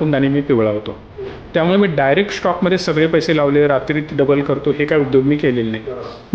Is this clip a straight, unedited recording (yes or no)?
yes